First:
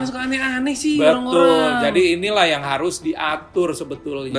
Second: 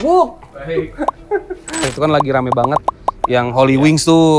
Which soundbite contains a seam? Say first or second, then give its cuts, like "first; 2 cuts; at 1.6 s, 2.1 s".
second; 1 cut; at 1.9 s